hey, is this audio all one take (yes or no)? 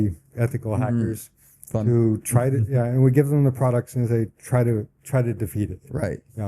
yes